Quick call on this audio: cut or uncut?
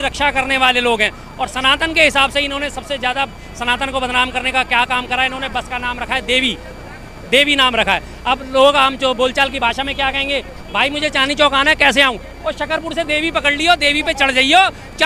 uncut